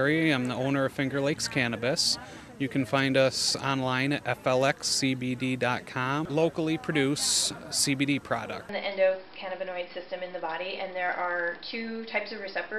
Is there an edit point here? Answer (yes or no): yes